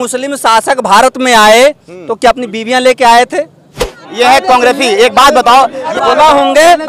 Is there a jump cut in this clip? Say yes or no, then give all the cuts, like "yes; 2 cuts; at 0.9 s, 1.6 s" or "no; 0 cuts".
yes; 2 cuts; at 4.0 s, 5.9 s